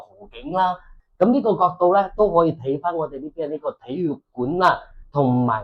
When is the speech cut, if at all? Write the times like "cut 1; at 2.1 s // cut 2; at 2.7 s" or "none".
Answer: cut 1; at 0.9 s